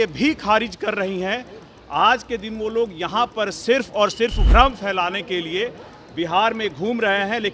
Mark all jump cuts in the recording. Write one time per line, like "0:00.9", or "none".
0:04.4